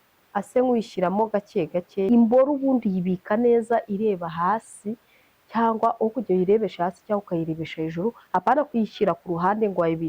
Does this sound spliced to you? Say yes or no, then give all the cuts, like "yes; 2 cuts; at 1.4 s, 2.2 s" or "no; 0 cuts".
yes; 1 cut; at 2.1 s